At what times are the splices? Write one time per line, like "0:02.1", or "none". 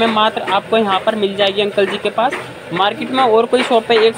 none